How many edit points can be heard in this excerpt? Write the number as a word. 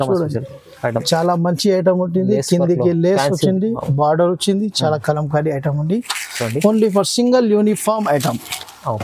zero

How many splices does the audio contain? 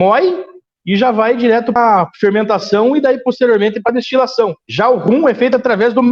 one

